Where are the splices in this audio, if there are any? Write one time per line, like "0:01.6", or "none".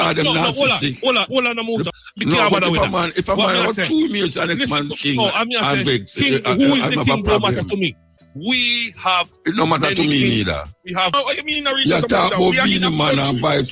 0:02.0
0:11.1

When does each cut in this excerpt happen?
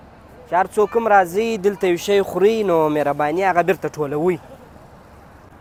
none

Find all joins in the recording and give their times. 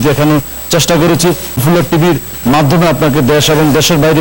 0:01.8

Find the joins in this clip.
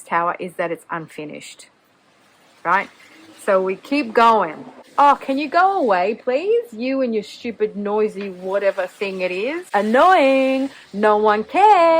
none

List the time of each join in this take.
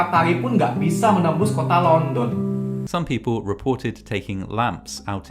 0:02.8

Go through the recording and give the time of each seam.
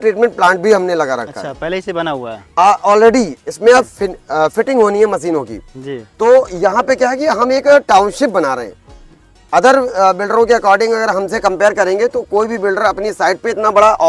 none

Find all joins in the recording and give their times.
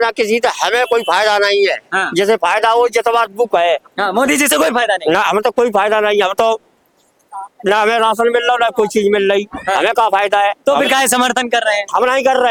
none

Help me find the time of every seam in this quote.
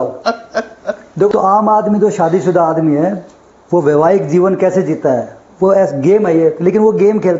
0:01.3

